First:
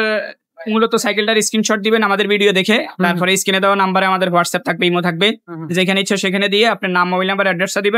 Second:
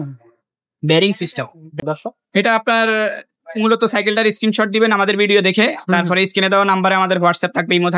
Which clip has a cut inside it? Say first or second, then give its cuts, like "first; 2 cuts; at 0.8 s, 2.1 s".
second; 1 cut; at 1.8 s